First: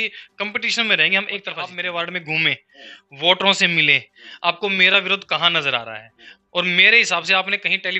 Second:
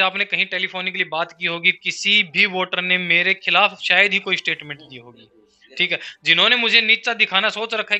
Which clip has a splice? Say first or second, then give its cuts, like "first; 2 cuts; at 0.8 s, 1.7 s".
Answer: first; 1 cut; at 1.6 s